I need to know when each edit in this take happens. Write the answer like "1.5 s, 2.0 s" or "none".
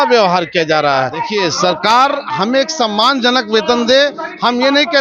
1.3 s